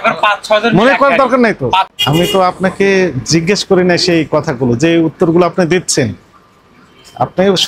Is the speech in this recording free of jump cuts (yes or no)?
no